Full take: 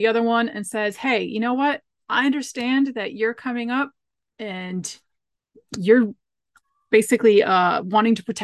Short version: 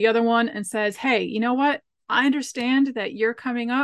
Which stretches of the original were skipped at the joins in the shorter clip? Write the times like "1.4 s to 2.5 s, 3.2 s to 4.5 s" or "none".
none